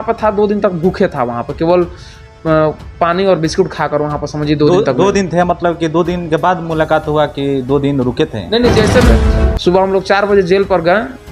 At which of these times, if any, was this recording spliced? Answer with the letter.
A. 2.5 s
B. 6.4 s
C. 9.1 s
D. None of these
C